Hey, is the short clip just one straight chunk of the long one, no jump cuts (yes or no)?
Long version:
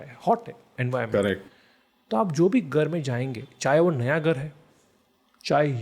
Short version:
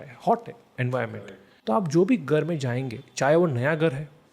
no